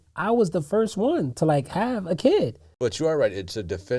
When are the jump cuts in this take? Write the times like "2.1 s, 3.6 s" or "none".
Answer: 2.6 s